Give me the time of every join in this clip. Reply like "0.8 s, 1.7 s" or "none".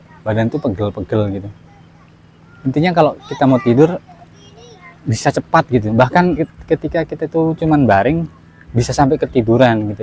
6.5 s